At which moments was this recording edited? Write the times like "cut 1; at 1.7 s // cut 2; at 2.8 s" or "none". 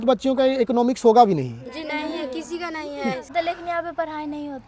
cut 1; at 3.3 s

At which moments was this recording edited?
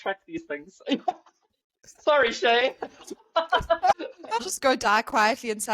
cut 1; at 4.5 s

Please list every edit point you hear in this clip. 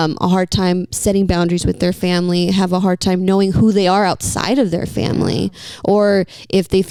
none

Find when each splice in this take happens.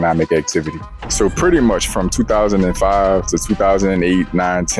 cut 1; at 1.0 s

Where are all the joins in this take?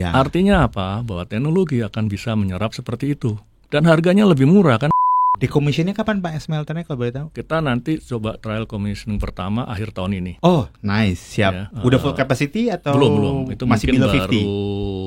cut 1; at 4.9 s // cut 2; at 7.3 s // cut 3; at 10.3 s // cut 4; at 11.7 s

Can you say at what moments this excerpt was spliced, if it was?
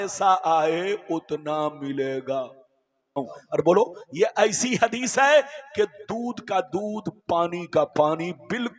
cut 1; at 3.3 s

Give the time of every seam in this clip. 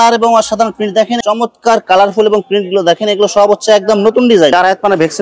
cut 1; at 1.2 s // cut 2; at 4.5 s

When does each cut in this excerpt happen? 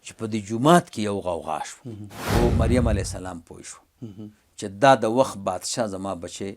cut 1; at 2.2 s

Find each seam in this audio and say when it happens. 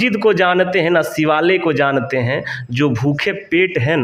none

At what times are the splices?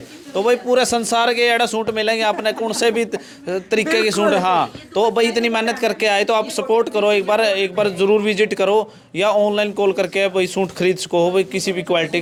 none

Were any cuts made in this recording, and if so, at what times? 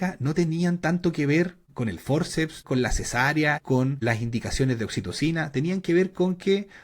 cut 1; at 1.7 s // cut 2; at 2.6 s // cut 3; at 3.7 s

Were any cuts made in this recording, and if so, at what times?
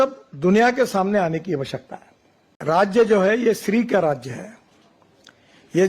cut 1; at 2.9 s

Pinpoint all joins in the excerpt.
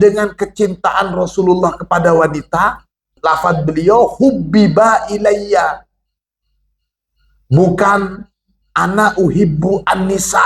cut 1; at 3.1 s

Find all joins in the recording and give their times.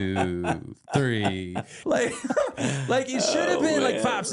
cut 1; at 1.7 s

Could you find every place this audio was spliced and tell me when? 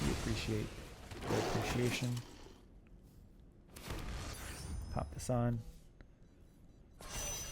cut 1; at 4.3 s

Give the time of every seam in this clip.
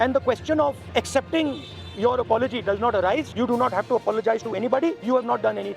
cut 1; at 0.8 s // cut 2; at 3.3 s // cut 3; at 5.0 s

